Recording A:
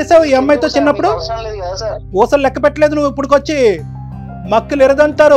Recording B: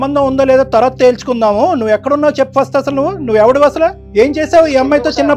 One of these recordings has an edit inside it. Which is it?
A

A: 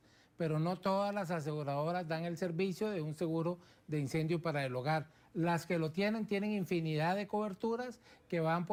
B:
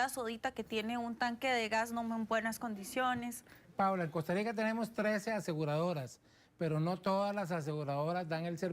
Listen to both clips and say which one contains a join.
B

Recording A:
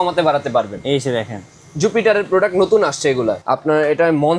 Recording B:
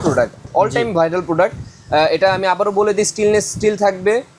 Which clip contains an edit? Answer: A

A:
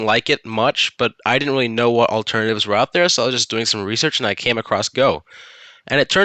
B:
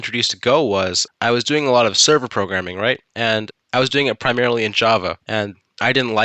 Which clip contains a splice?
B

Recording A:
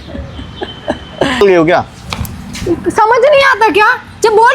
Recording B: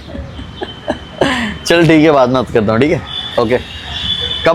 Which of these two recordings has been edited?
A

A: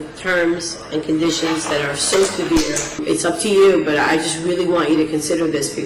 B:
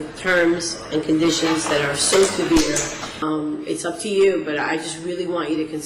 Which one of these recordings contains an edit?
A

